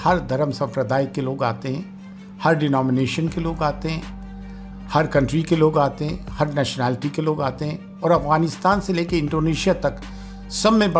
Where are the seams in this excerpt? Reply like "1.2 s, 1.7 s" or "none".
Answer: none